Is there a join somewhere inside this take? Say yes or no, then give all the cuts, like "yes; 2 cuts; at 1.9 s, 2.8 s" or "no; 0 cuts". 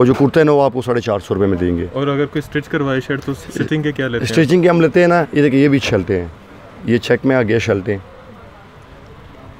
no; 0 cuts